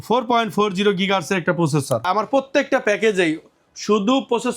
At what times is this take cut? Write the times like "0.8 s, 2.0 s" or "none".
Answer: 2.1 s